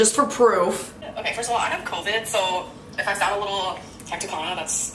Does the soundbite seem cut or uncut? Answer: cut